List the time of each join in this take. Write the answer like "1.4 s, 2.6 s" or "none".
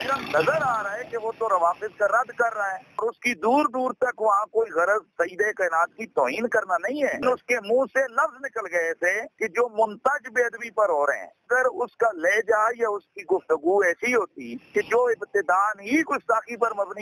none